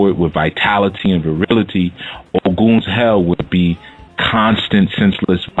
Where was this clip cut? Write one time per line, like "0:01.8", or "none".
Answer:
0:02.0